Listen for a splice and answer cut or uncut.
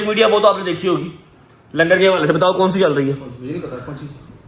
uncut